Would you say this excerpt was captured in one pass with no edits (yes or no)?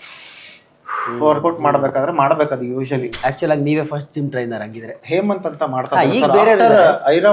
no